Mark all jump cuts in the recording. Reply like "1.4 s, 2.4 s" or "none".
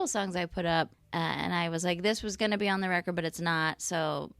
1.0 s